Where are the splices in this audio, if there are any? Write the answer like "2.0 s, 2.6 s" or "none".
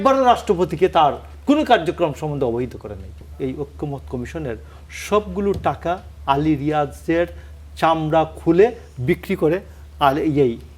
3.3 s